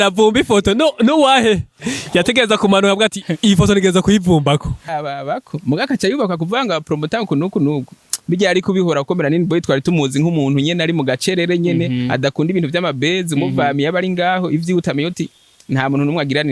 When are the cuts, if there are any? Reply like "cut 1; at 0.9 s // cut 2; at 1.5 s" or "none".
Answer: cut 1; at 5.0 s

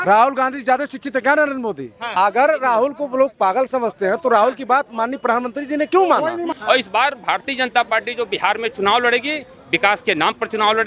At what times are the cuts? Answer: cut 1; at 2.1 s // cut 2; at 6.5 s

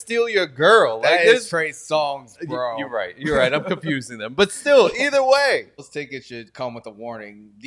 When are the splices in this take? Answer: cut 1; at 5.8 s

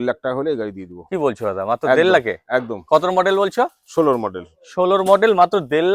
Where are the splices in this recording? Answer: none

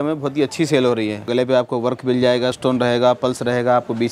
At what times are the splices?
cut 1; at 1.3 s // cut 2; at 2.6 s

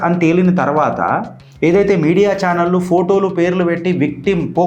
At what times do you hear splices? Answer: none

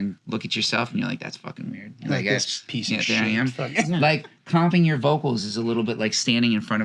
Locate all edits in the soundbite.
none

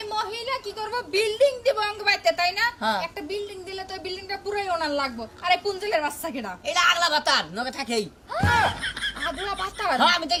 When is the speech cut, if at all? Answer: none

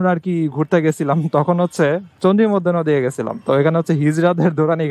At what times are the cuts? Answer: none

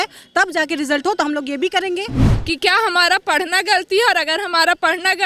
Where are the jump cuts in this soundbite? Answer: cut 1; at 2.3 s

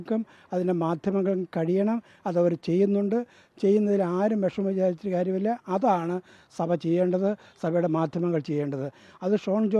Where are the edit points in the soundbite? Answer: none

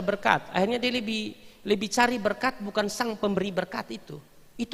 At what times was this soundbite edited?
none

